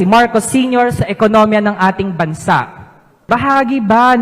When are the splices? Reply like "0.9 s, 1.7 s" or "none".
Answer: 3.3 s